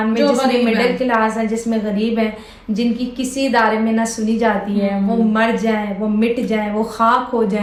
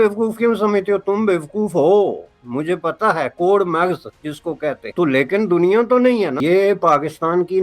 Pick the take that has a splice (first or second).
second